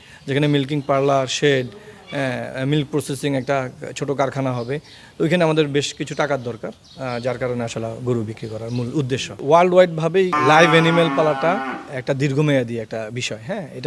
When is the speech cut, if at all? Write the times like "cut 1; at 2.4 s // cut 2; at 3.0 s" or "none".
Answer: cut 1; at 9.4 s // cut 2; at 10.4 s